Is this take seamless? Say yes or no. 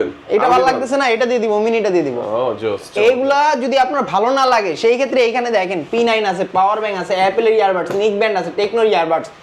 yes